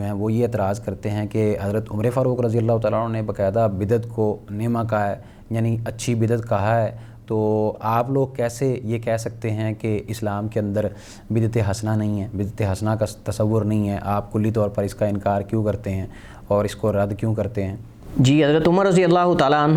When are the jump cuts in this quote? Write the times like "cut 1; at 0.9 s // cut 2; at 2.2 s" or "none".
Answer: none